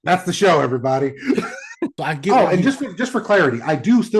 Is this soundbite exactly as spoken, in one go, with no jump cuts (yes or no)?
no